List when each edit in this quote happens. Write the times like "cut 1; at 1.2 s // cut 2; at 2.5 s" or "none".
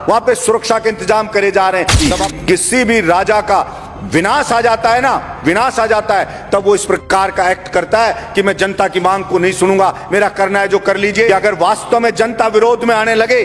cut 1; at 2.0 s // cut 2; at 11.3 s